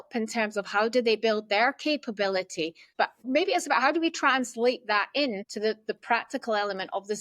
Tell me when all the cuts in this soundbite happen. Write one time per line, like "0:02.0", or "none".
0:02.9